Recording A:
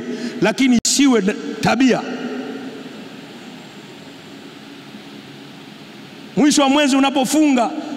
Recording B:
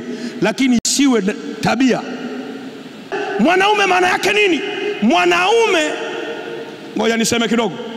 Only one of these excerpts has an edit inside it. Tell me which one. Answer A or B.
B